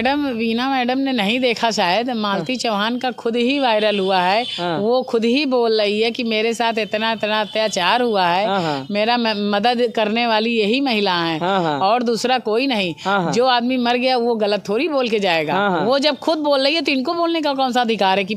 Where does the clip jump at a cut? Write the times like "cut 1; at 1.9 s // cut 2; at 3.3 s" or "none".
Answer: none